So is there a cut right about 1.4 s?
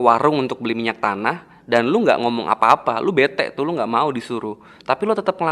no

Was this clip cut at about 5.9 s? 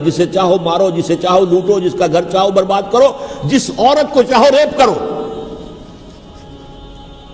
no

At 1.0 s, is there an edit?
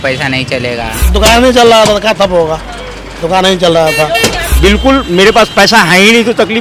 yes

